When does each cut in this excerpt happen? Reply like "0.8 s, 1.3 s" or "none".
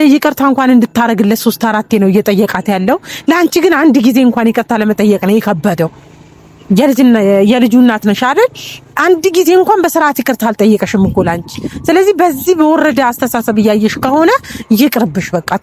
none